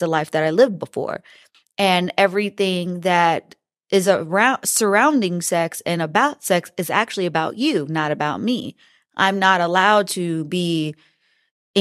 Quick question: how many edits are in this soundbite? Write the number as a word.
zero